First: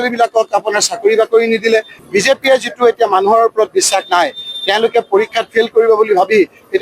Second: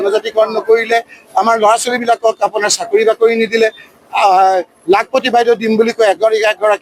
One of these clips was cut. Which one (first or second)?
first